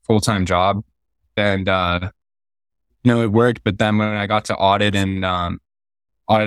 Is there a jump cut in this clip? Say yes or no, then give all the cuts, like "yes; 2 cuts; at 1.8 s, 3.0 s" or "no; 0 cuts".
yes; 1 cut; at 1.3 s